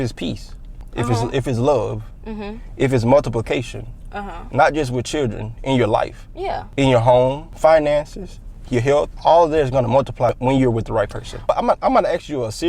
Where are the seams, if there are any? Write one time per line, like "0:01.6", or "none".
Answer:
0:11.3